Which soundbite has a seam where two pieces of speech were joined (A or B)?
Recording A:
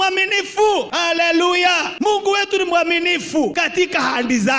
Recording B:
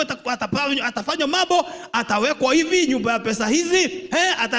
A